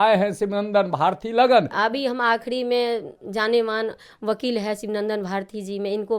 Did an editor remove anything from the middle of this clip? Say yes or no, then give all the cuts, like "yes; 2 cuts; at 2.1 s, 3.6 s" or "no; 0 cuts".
yes; 1 cut; at 1.7 s